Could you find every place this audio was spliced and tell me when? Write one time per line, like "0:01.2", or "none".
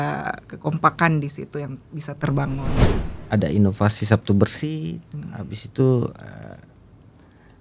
0:02.8